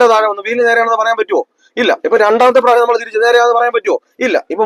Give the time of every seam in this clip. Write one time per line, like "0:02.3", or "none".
none